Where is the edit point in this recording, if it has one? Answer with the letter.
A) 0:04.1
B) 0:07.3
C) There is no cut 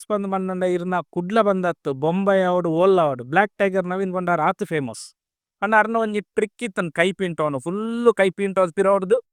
C